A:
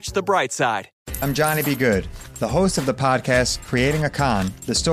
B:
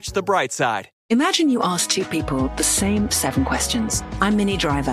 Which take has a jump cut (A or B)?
A